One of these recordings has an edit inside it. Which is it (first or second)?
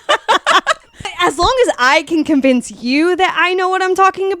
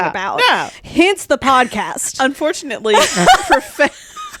first